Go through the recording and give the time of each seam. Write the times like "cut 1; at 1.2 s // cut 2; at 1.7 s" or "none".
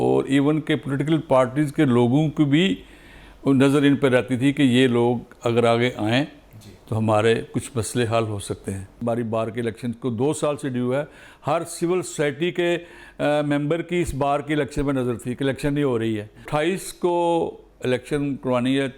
cut 1; at 8.9 s // cut 2; at 16.4 s